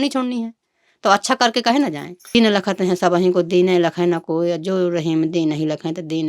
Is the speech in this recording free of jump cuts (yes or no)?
no